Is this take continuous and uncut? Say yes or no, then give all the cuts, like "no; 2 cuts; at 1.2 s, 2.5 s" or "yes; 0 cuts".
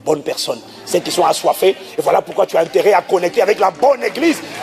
yes; 0 cuts